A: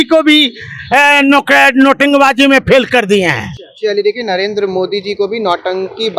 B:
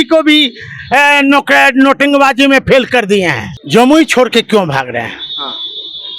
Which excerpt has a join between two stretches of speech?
B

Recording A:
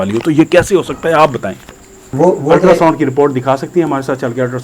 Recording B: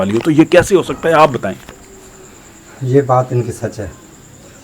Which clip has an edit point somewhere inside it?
A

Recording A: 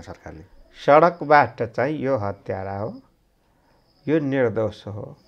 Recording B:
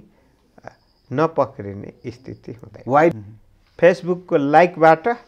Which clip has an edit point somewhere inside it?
B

